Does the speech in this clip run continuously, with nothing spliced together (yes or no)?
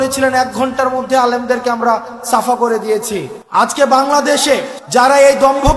no